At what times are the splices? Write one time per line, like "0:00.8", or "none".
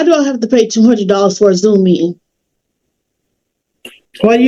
none